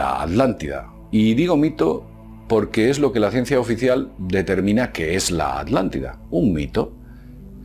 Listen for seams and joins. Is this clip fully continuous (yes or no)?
no